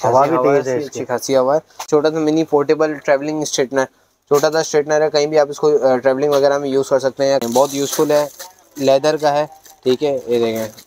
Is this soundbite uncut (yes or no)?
no